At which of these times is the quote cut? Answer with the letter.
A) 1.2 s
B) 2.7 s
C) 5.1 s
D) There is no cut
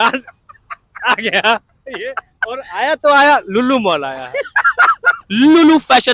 C